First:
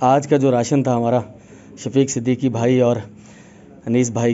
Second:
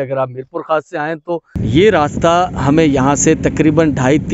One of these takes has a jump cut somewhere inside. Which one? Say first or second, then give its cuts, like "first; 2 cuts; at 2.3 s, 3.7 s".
second; 1 cut; at 1.7 s